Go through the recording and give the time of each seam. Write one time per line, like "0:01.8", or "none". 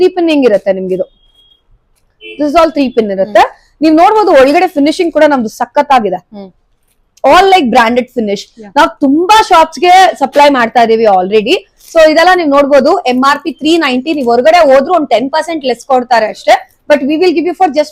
none

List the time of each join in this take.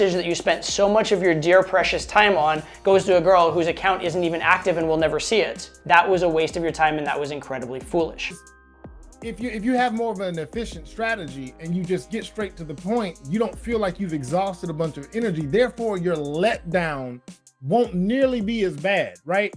0:08.5

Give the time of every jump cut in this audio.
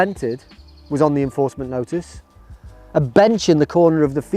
none

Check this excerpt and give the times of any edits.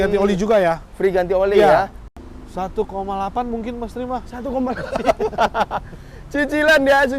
0:02.1

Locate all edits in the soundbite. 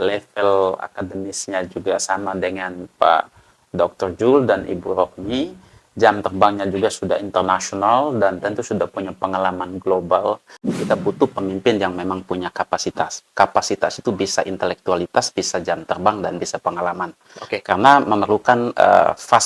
0:10.6

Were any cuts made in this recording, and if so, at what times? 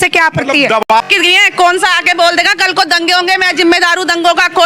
0:01.1

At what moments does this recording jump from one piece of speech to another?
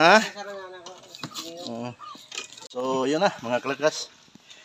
0:02.6

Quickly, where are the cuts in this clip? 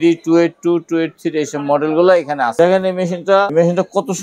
0:02.5
0:03.5

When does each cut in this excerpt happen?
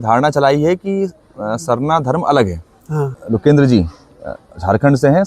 0:03.2

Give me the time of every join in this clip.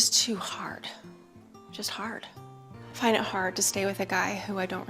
0:02.4

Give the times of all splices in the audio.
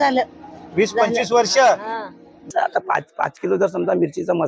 0:02.5

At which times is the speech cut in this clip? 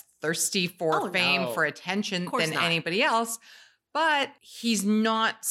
0:04.4

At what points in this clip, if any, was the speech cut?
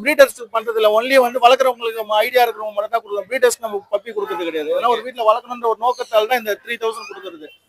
none

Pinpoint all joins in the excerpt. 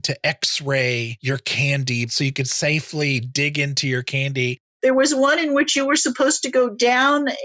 0:01.1
0:02.1
0:04.6

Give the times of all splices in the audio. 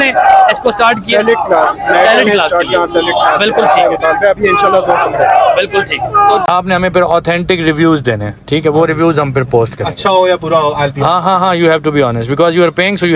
0:06.5

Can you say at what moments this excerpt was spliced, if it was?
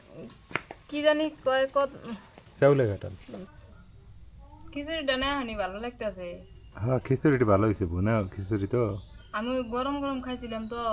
0:03.5

